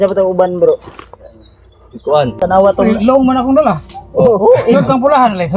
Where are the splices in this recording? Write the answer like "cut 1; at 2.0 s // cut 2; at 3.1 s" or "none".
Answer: cut 1; at 2.4 s